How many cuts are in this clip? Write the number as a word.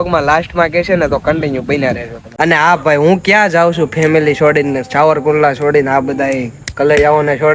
one